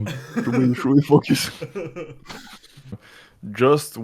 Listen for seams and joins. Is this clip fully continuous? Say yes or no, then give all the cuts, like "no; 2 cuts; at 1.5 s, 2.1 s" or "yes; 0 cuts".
no; 1 cut; at 3.1 s